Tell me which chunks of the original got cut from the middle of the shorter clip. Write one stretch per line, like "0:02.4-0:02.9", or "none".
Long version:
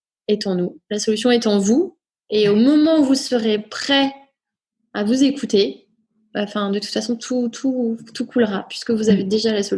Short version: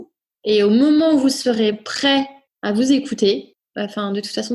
0:04.3-0:04.8
0:05.9-0:06.2